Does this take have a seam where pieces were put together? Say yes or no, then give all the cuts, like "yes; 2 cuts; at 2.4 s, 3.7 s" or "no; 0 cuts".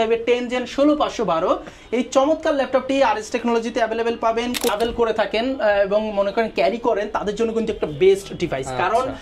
yes; 1 cut; at 4.7 s